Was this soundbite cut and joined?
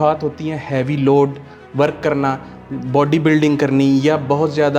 no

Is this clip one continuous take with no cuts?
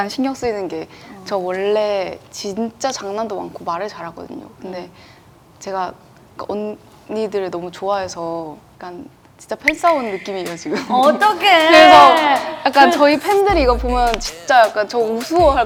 yes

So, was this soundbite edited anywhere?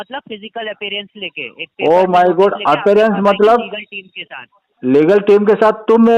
no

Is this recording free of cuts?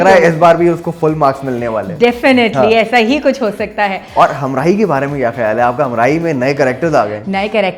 yes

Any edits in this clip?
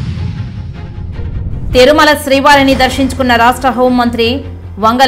yes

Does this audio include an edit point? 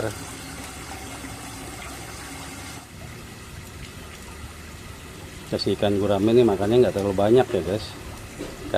yes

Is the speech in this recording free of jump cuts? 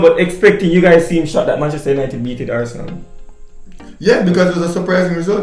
yes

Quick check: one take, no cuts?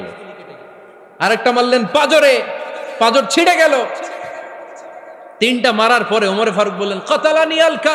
yes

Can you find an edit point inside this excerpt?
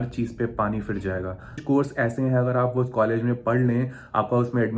yes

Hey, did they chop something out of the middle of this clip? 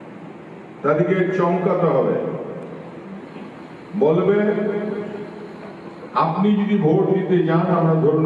no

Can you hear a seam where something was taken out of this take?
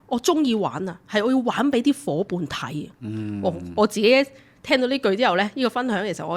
no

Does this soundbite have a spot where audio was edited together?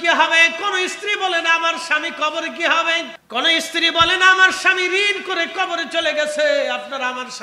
yes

